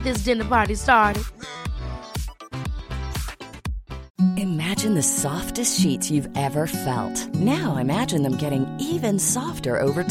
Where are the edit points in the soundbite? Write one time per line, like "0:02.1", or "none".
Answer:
0:03.9